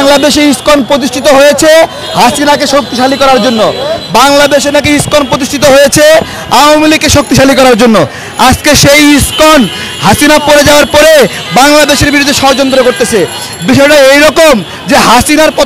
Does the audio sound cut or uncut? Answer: uncut